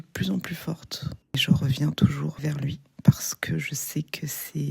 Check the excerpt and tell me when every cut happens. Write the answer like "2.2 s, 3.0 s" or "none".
1.4 s, 2.4 s